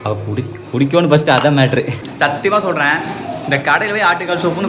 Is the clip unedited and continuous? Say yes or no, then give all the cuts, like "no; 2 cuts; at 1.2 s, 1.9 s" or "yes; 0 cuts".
no; 1 cut; at 2.0 s